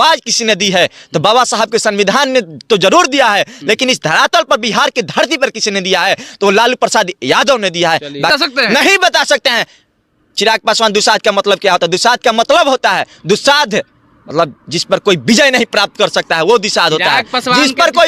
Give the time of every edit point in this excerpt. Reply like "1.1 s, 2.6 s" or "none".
8.3 s